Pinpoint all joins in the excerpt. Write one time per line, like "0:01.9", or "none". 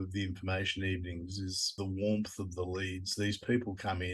0:01.7